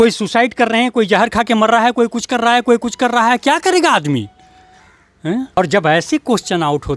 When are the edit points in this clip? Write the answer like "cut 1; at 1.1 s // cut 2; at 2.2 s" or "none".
cut 1; at 5.6 s